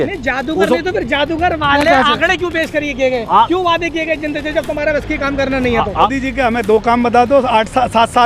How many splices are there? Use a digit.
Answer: 1